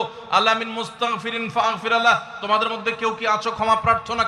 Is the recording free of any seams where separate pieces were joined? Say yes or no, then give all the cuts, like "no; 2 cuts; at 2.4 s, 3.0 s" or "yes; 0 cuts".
yes; 0 cuts